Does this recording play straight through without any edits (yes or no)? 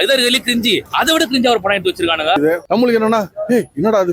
no